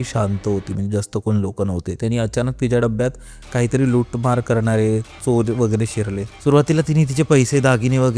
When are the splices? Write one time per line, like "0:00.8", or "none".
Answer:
0:02.0